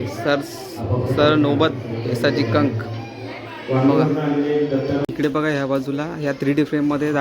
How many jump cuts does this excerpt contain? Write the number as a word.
one